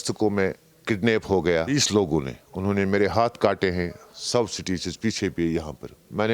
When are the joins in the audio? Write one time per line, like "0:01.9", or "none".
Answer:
0:01.7